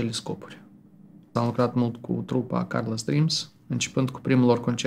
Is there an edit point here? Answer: yes; 1 cut; at 1.3 s

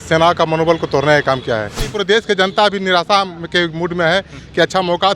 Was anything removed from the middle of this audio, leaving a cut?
yes; 1 cut; at 1.9 s

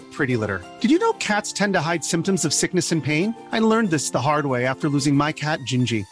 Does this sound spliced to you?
no; 0 cuts

